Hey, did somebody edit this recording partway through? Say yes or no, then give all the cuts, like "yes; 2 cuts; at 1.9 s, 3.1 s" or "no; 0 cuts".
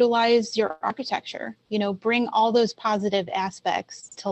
no; 0 cuts